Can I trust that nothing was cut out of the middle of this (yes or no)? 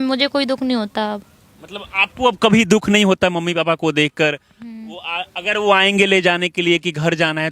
yes